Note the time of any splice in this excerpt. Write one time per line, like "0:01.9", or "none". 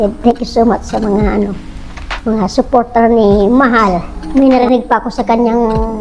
0:04.1

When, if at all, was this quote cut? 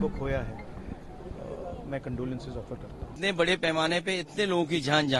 0:03.2

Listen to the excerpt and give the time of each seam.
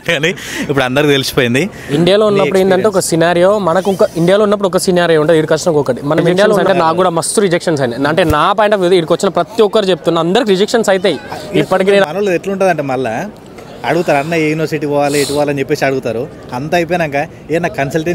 0:01.8
0:06.6
0:12.0

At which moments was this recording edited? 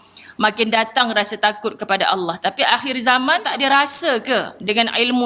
0:03.5

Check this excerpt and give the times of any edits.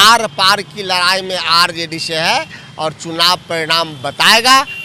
none

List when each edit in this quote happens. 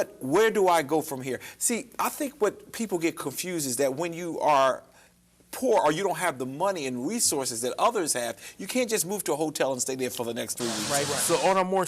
0:10.9

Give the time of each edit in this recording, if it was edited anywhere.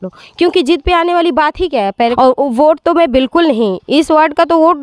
0:02.1

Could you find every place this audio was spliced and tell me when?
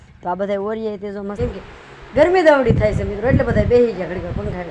0:01.3

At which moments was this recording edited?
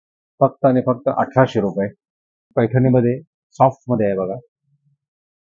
0:02.5

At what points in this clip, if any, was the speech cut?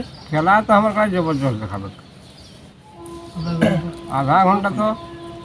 none

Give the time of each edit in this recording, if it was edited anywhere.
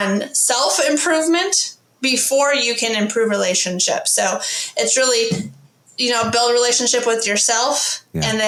none

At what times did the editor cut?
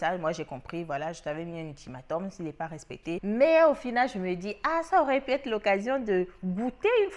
0:03.2

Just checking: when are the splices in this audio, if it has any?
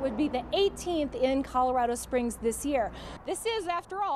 0:03.1

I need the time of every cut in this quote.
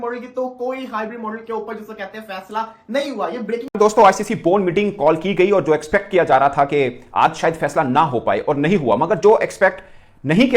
0:03.7

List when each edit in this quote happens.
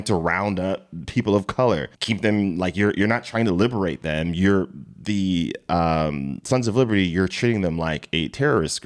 0:02.0

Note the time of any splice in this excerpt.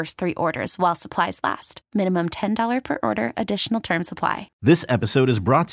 0:04.5

